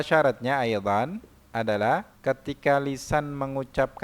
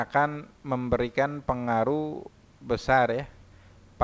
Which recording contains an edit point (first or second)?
first